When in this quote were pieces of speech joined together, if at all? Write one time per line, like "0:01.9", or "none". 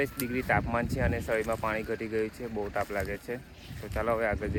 none